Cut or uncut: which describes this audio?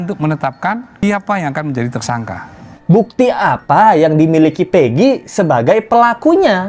cut